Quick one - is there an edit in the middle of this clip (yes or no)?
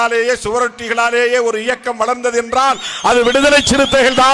no